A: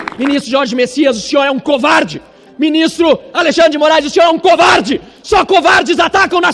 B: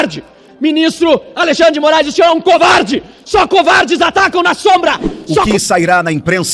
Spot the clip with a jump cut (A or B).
B